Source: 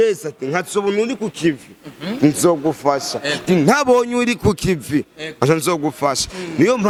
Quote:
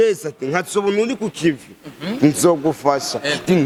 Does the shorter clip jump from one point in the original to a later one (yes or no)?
no